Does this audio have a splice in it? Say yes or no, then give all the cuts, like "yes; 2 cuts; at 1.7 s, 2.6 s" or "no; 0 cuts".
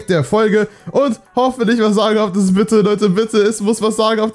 no; 0 cuts